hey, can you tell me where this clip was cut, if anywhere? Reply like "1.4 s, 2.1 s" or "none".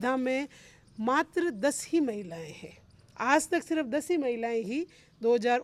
none